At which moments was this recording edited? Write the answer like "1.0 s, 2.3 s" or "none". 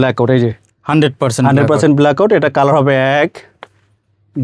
none